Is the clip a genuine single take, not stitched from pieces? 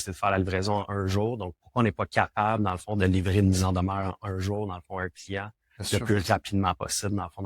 yes; 0 cuts

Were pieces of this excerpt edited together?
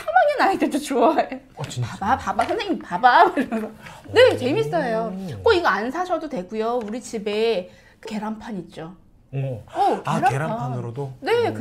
no; 0 cuts

